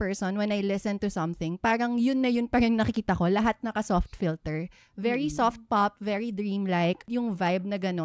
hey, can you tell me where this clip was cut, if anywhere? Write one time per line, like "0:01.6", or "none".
0:07.0